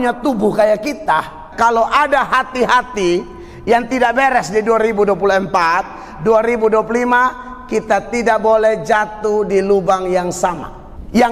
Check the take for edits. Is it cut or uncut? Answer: cut